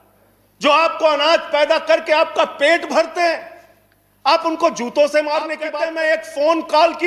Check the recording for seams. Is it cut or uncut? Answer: cut